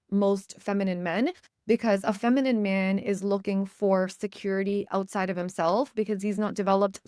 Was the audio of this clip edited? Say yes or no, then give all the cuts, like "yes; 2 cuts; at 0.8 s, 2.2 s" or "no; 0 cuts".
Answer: no; 0 cuts